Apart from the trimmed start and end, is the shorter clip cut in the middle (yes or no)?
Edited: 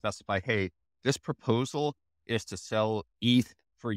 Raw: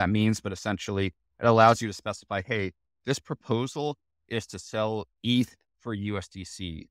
no